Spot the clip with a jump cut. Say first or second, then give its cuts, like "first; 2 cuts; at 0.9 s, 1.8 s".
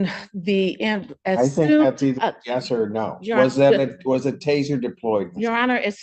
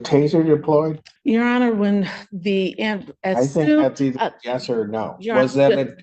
second; 1 cut; at 1.1 s